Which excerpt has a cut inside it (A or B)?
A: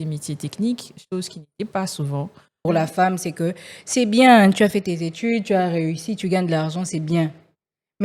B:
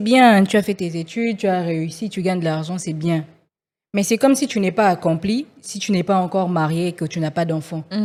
A